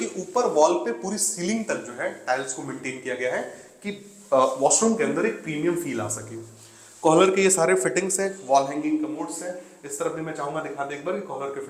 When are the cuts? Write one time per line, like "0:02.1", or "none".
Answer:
none